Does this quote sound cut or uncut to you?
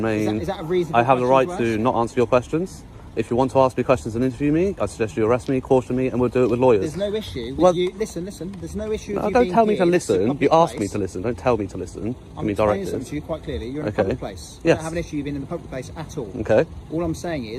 uncut